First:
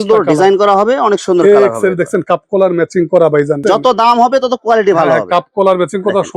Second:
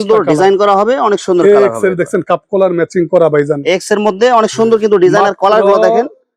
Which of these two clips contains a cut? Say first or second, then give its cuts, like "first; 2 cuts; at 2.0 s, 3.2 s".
first; 1 cut; at 3.6 s